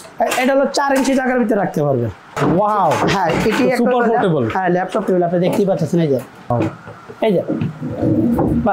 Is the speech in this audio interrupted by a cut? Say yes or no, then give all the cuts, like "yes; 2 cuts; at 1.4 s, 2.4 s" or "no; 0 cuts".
yes; 2 cuts; at 2.2 s, 6.5 s